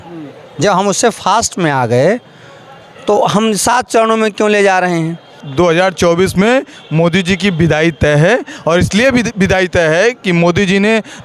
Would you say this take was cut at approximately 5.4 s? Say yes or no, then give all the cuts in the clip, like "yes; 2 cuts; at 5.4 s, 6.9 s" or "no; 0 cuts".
yes; 1 cut; at 5.4 s